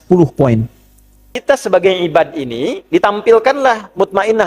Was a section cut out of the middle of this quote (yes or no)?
yes